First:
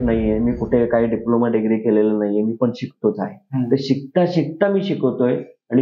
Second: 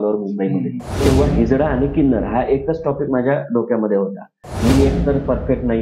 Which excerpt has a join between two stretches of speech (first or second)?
second